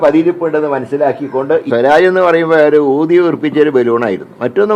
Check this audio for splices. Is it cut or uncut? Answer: cut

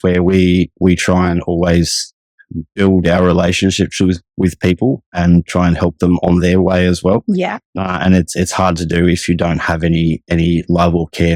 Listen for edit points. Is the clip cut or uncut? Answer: uncut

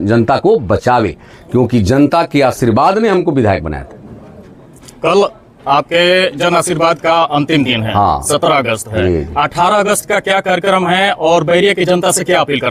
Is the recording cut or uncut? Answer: uncut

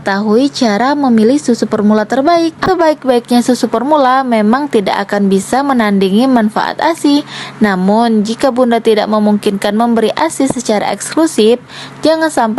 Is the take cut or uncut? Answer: cut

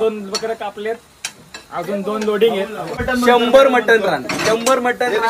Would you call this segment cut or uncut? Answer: cut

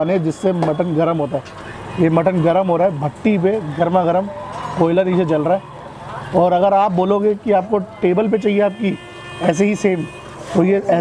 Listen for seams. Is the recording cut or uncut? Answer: uncut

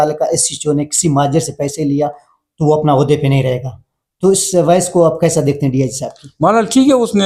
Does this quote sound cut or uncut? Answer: uncut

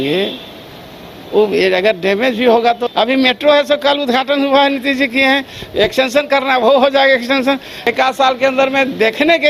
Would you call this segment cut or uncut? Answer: cut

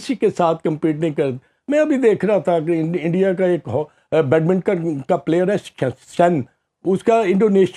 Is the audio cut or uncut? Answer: uncut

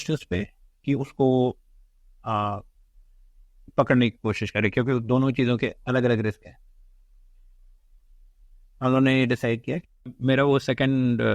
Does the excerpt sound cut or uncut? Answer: cut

